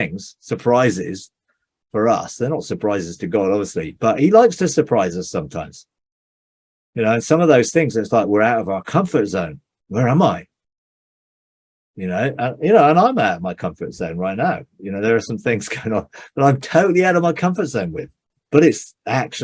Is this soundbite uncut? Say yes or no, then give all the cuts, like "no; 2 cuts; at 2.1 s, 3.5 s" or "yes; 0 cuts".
no; 1 cut; at 18.3 s